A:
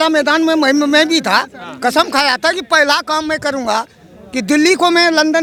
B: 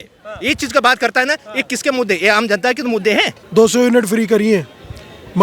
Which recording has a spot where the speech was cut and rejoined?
B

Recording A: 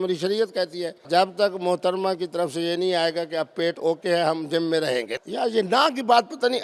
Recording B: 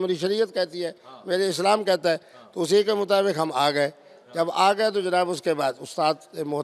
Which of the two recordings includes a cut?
A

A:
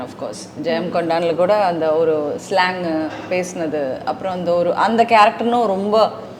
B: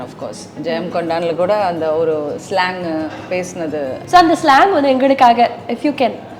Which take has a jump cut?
B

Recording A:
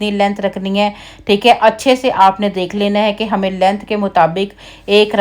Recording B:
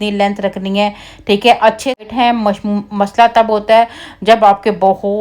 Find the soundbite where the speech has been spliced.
B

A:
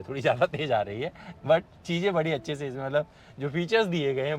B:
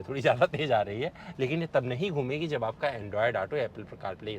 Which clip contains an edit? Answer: B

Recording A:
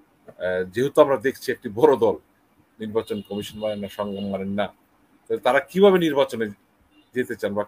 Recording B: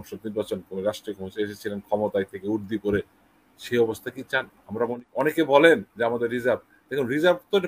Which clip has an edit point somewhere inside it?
B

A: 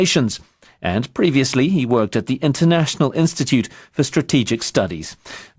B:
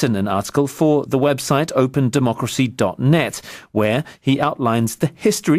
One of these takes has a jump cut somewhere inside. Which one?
A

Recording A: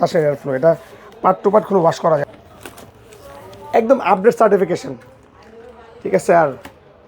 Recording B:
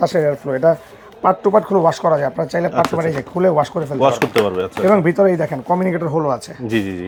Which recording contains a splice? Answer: A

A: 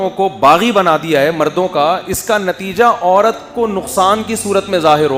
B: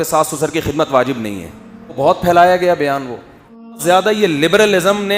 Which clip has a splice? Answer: B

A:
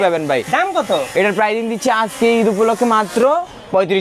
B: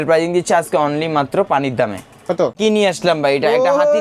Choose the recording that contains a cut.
B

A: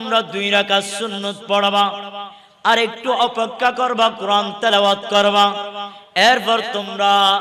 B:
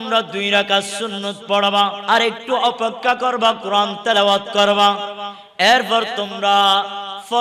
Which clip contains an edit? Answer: B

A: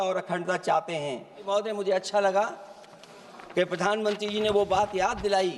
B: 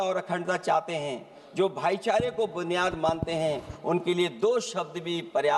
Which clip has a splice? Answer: A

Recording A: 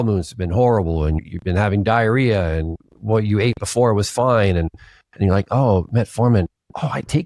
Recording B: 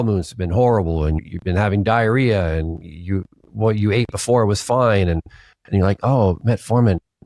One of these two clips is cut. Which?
A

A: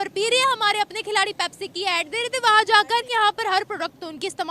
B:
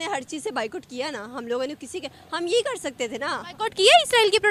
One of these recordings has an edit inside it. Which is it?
A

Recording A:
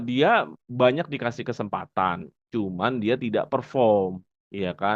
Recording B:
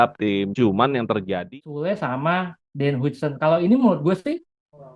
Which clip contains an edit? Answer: B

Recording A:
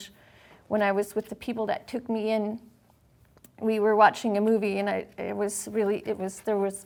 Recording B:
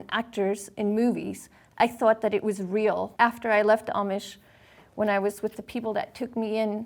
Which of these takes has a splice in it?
B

